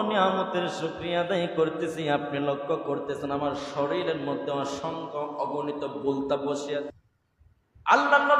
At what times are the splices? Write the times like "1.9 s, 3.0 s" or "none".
6.9 s